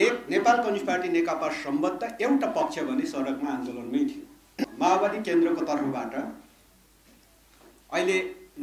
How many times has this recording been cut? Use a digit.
1